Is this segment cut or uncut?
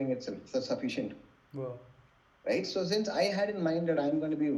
uncut